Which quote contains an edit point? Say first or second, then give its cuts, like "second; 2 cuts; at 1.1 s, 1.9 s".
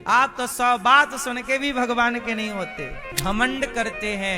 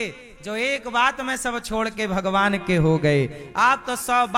first; 1 cut; at 3.0 s